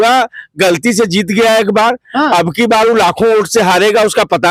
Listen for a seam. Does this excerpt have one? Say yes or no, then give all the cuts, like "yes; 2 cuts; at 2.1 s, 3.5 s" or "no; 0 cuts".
no; 0 cuts